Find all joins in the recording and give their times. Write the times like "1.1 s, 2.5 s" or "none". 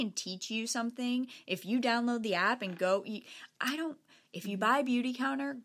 none